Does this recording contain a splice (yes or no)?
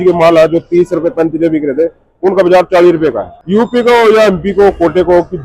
yes